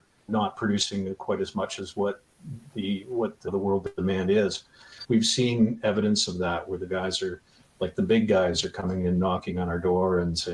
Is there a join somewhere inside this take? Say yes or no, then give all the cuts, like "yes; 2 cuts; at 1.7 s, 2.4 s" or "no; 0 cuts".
yes; 1 cut; at 4.9 s